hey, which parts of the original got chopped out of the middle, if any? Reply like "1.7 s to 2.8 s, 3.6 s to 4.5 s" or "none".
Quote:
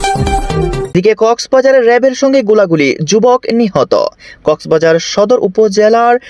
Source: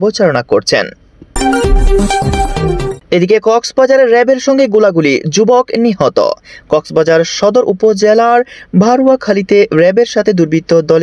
3.0 s to 3.2 s